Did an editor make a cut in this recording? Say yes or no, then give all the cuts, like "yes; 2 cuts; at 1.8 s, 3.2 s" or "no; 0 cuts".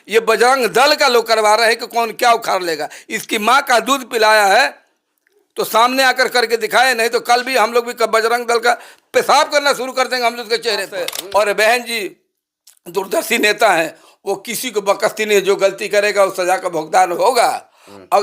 yes; 1 cut; at 11.2 s